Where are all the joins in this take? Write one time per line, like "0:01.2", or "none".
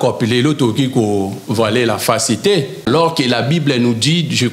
0:02.9